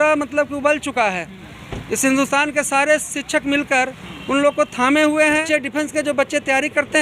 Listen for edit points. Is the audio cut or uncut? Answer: cut